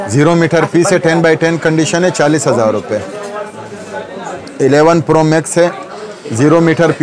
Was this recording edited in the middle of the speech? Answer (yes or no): no